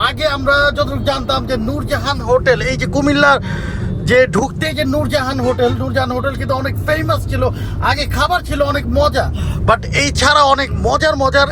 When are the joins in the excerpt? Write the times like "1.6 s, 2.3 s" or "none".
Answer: none